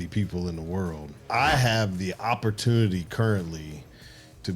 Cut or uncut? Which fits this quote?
cut